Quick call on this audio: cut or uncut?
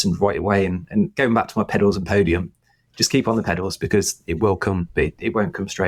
uncut